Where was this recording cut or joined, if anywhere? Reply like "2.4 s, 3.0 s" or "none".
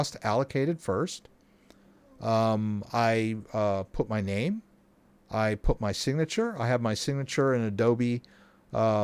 none